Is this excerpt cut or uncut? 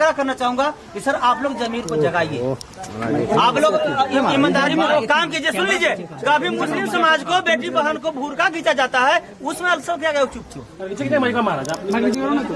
uncut